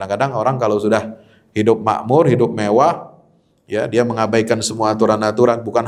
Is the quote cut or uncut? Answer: uncut